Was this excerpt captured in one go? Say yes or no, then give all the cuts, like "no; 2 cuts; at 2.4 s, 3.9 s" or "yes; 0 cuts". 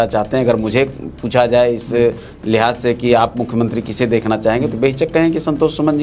yes; 0 cuts